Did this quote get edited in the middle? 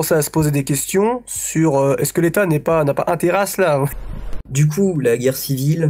yes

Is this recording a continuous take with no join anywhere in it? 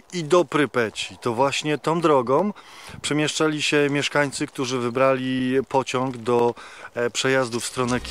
yes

